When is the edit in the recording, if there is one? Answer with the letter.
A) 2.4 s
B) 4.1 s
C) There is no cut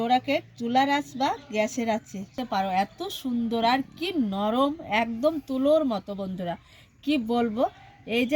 A